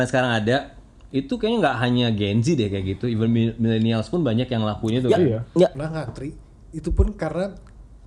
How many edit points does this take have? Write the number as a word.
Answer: one